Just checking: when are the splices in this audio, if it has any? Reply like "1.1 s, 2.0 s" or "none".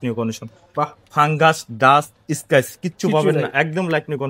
none